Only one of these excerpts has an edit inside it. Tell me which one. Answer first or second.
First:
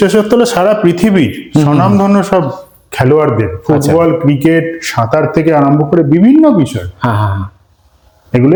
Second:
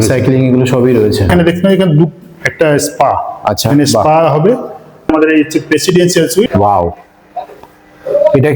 second